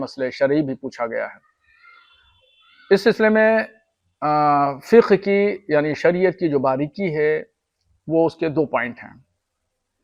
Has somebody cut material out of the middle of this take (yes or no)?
no